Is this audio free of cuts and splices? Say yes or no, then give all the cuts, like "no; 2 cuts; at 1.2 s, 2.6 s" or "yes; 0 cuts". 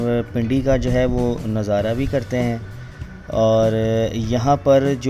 yes; 0 cuts